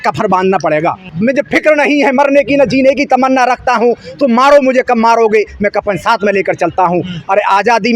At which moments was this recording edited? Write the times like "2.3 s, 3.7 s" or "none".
1.1 s